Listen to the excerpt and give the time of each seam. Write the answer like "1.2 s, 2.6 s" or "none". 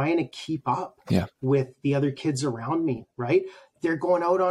none